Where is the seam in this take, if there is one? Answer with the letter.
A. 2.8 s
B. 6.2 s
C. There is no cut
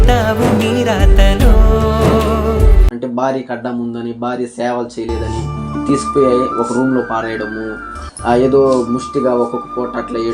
A